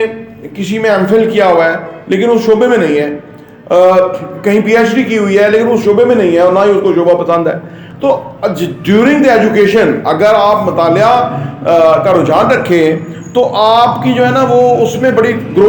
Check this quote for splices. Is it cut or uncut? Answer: uncut